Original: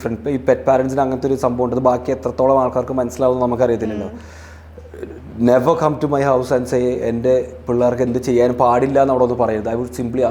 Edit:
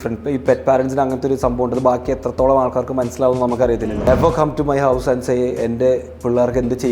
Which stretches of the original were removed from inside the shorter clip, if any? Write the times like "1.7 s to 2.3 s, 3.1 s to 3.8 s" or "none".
4.1 s to 5.5 s